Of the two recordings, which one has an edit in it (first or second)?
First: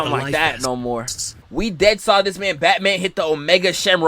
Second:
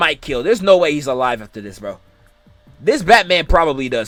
first